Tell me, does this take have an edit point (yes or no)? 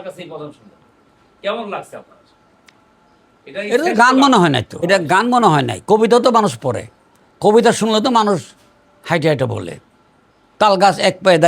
yes